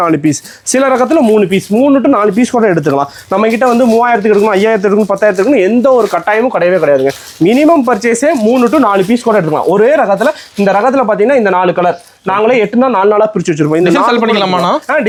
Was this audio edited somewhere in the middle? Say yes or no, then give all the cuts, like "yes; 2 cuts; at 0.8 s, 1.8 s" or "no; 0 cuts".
no; 0 cuts